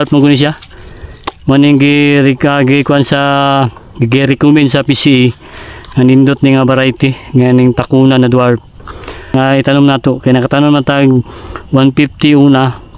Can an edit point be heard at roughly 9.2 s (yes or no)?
yes